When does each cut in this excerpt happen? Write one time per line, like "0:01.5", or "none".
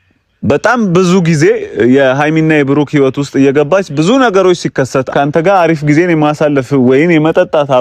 0:05.1